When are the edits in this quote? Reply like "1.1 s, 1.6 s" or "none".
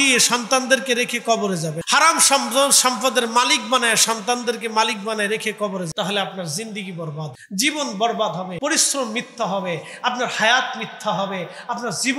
1.8 s, 5.9 s, 7.4 s, 8.5 s